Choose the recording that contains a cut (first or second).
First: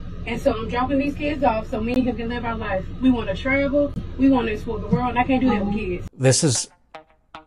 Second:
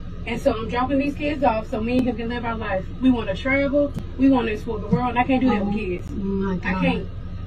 first